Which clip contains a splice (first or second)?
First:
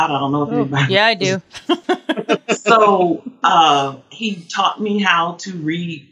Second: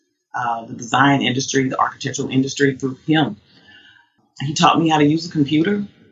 first